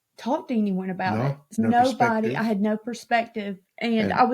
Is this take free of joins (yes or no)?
no